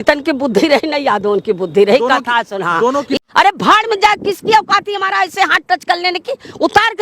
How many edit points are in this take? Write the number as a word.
one